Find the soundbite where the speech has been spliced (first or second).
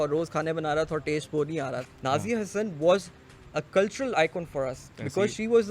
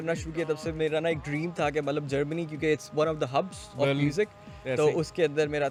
first